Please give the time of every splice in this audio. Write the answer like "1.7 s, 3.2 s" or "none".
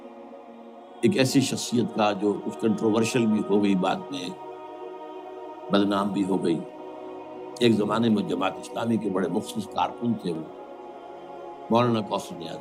none